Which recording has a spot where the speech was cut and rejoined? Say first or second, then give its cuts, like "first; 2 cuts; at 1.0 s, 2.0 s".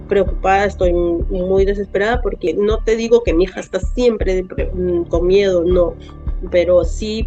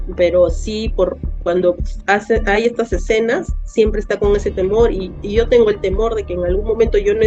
first; 1 cut; at 2.5 s